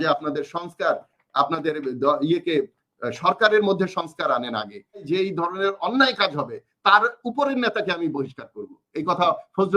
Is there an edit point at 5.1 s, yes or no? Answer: yes